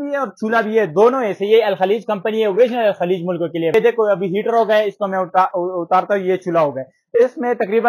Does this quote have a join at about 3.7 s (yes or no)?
yes